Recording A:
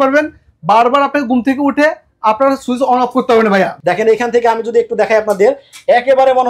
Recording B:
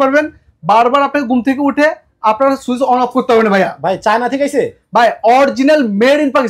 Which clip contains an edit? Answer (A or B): A